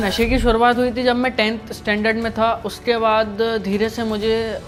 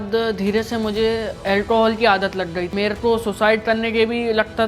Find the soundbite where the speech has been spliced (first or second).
second